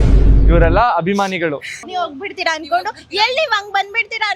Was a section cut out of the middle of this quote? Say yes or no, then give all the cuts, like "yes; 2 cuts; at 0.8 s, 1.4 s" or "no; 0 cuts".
yes; 1 cut; at 1.7 s